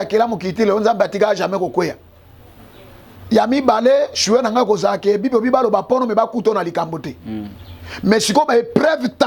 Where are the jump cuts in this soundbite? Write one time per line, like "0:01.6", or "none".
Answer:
none